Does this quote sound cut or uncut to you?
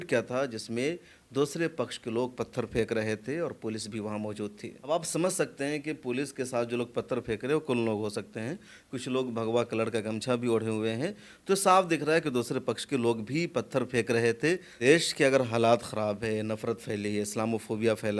cut